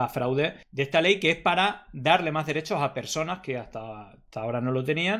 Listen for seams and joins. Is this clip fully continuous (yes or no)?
yes